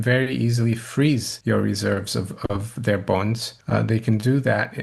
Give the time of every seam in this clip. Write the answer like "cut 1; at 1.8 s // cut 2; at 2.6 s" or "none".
cut 1; at 1.3 s // cut 2; at 3.5 s